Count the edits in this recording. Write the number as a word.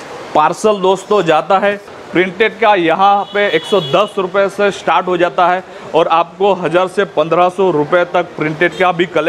one